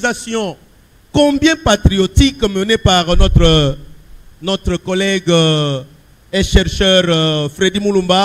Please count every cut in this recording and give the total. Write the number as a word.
zero